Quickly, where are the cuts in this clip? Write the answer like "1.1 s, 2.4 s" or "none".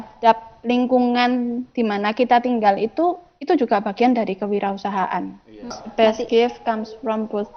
5.8 s